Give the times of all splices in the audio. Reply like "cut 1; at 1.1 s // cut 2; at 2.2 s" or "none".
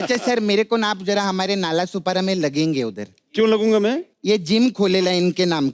cut 1; at 4.1 s